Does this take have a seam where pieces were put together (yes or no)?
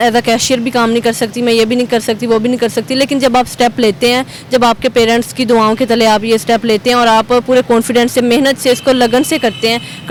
no